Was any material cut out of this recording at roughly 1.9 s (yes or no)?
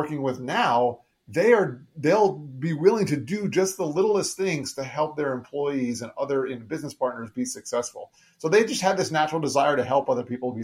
no